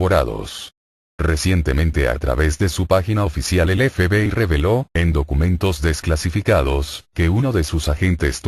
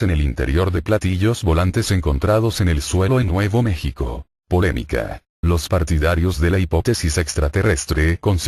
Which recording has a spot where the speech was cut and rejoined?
first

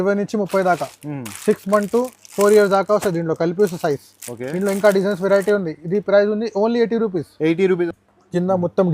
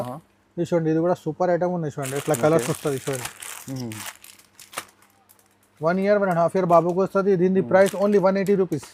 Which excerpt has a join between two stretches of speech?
first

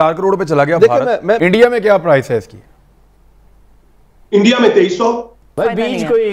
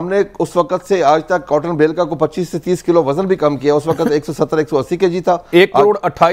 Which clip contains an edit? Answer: first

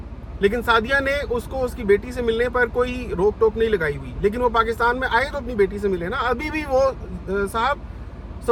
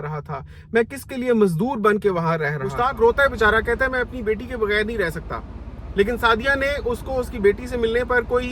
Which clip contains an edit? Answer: second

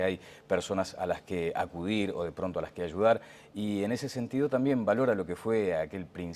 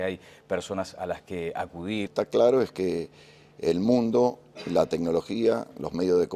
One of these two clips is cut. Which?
first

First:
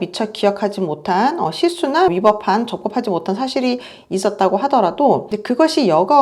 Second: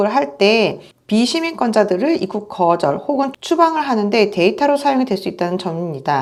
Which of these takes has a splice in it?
first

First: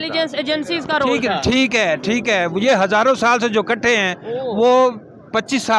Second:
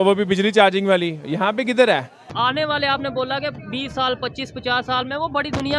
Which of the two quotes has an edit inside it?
second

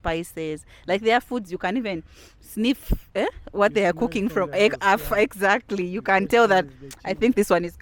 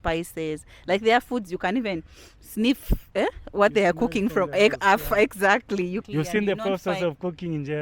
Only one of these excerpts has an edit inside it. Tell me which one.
second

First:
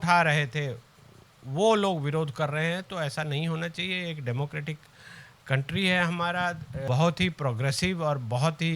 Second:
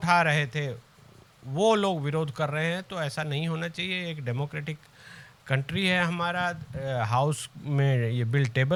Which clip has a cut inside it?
first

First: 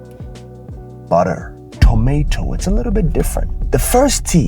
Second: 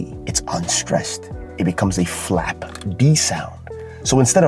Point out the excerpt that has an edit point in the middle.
first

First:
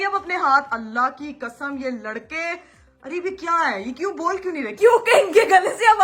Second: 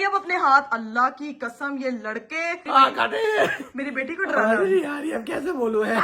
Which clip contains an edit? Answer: second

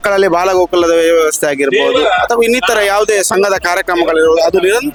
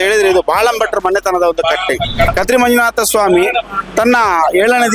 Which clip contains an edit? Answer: second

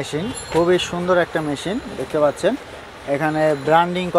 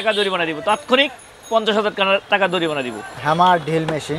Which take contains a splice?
second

